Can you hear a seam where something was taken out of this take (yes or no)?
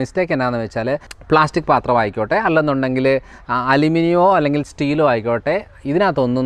yes